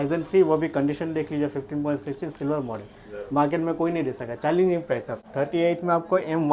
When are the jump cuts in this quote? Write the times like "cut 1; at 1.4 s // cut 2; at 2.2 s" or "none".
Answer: cut 1; at 5.2 s